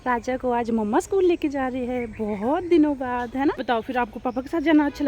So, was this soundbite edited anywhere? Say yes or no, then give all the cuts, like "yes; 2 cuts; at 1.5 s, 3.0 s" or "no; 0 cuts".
yes; 1 cut; at 3.6 s